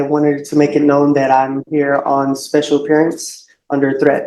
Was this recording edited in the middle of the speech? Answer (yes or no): no